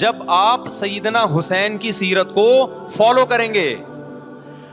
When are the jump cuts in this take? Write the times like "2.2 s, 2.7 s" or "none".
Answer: 3.8 s